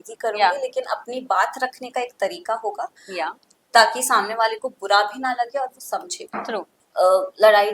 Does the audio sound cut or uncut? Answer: cut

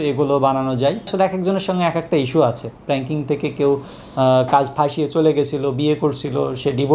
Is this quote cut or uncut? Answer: cut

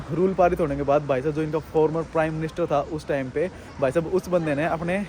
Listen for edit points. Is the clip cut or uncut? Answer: uncut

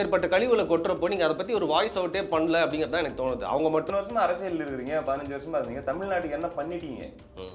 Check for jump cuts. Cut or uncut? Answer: cut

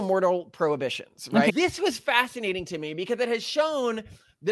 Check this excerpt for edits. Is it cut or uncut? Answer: cut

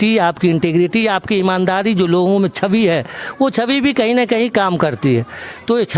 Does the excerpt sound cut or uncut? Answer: uncut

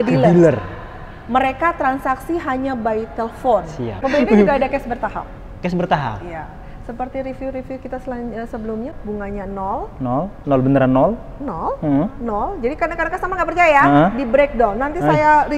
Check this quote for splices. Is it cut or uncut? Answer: cut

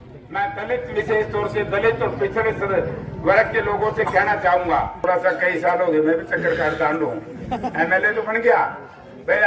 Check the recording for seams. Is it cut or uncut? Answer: cut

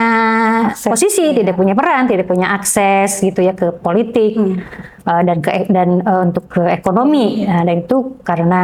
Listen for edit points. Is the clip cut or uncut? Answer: uncut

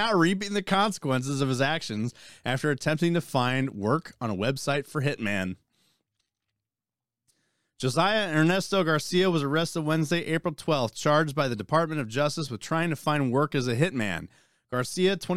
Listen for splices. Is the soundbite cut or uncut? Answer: uncut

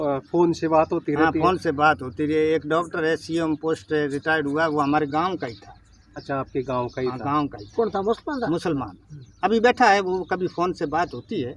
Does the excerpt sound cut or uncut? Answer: uncut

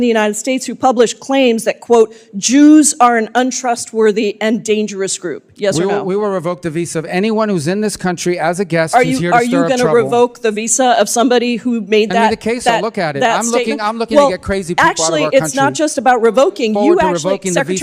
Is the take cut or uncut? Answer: uncut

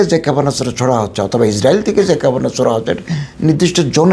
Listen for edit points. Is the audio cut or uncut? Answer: uncut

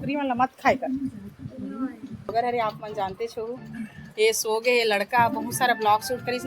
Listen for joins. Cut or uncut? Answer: cut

